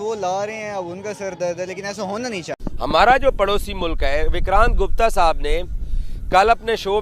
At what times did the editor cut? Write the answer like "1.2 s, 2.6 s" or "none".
2.5 s